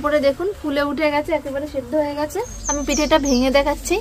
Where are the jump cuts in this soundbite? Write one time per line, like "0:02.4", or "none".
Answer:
0:02.6